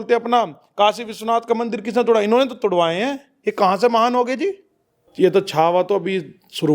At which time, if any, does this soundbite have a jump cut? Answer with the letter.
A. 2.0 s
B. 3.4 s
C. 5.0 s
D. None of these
C